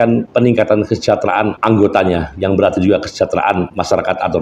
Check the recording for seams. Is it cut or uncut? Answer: uncut